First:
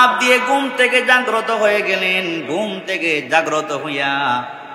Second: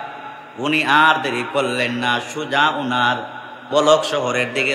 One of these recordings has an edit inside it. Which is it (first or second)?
second